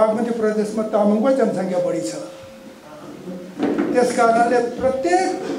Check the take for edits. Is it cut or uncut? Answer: uncut